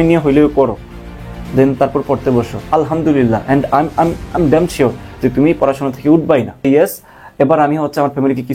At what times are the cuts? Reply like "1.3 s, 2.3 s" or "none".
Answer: 6.7 s